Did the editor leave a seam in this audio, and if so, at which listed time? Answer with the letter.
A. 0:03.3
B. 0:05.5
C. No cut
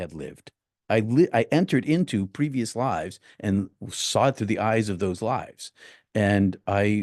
C